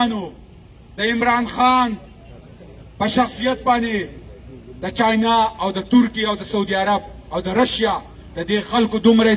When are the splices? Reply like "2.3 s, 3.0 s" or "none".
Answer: none